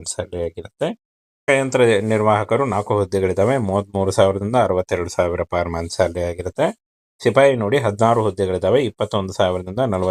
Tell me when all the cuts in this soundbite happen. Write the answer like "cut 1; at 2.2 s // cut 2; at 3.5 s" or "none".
cut 1; at 1.4 s